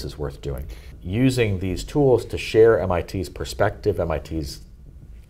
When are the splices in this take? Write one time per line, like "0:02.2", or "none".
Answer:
0:01.0

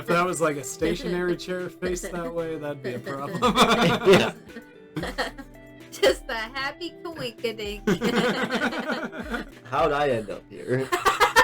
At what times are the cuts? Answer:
0:09.5

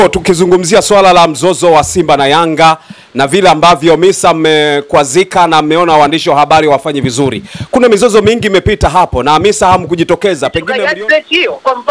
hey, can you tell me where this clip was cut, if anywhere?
0:10.6

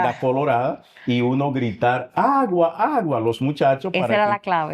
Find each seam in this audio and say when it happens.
none

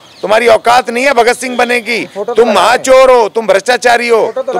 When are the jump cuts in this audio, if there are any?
none

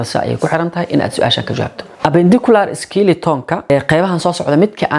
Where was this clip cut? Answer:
0:01.8
0:03.7

